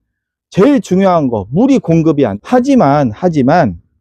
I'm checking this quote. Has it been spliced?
yes; 1 cut; at 2.4 s

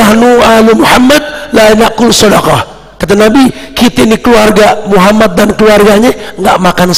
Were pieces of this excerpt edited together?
no; 0 cuts

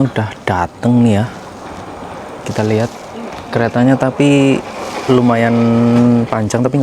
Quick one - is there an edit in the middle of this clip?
no; 0 cuts

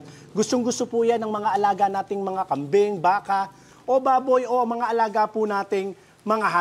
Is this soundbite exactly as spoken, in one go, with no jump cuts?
yes; 0 cuts

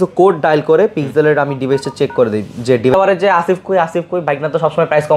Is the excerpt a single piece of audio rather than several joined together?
no; 1 cut; at 2.9 s

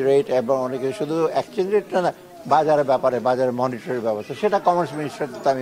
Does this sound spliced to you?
no; 0 cuts

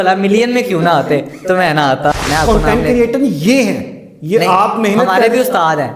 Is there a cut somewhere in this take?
yes; 1 cut; at 2.1 s

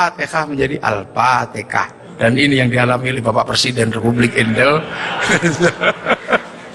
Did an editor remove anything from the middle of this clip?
no; 0 cuts

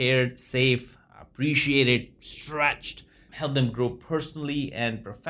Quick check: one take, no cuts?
no; 1 cut; at 3.3 s

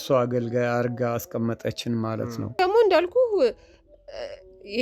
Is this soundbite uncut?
no; 1 cut; at 2.6 s

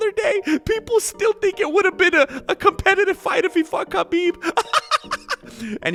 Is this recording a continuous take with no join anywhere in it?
yes; 0 cuts

